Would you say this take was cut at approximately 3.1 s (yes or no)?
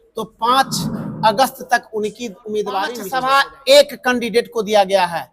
yes